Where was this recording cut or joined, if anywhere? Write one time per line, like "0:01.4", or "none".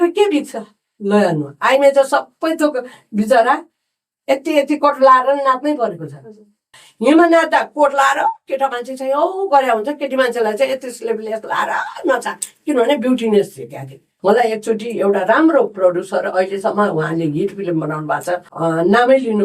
0:06.6
0:14.1
0:18.5